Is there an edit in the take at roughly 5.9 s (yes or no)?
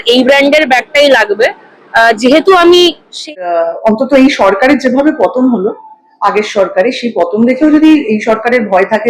no